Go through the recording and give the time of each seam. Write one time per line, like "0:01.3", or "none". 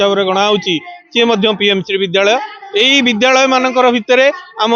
none